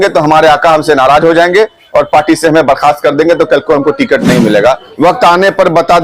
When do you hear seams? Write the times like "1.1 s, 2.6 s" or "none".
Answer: 4.9 s